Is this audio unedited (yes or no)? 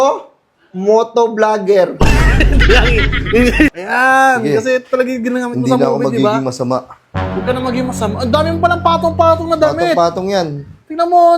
no